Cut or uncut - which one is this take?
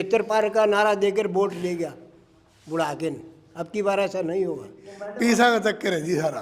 cut